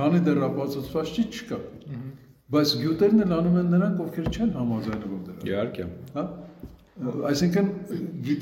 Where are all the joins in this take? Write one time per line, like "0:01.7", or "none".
none